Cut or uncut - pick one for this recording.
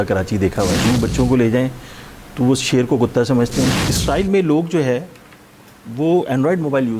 cut